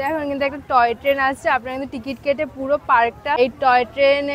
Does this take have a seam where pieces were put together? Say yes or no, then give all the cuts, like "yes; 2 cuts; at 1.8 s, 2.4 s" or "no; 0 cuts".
yes; 1 cut; at 3.4 s